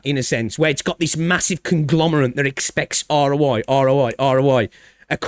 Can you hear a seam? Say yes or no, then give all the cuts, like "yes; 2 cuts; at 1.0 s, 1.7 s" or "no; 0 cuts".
no; 0 cuts